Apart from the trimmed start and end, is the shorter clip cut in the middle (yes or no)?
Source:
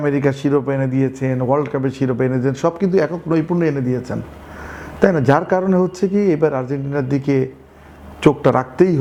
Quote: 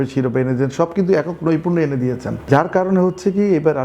yes